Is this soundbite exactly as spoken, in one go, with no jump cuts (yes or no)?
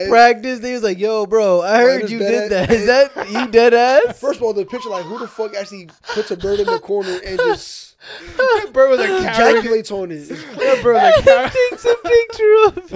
yes